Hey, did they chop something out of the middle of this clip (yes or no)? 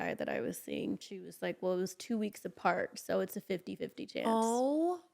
yes